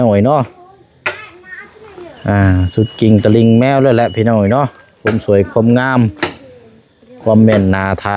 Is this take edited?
no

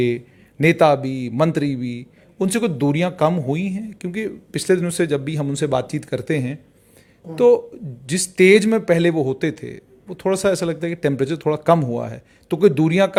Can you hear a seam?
no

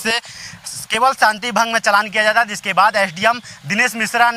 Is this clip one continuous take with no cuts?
yes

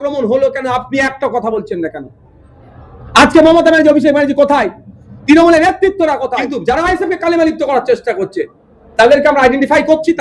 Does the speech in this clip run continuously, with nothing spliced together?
no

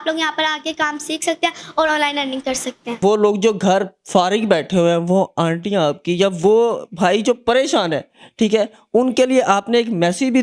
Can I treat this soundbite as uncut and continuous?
yes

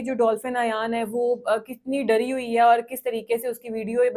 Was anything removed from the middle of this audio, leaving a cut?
no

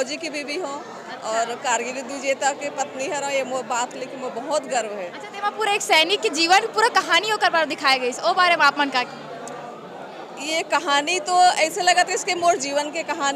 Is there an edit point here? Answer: no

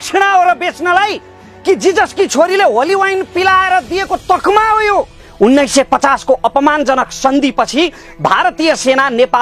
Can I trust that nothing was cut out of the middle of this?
no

